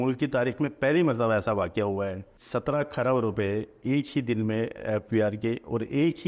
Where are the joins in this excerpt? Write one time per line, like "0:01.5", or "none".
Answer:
0:02.4